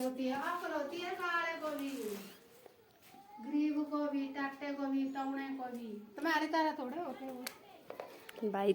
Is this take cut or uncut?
uncut